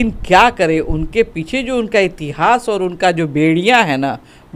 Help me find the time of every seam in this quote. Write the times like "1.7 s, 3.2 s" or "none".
none